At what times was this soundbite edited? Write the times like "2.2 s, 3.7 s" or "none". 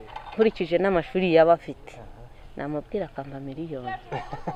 none